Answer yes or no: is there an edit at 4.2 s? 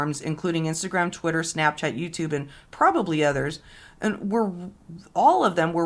no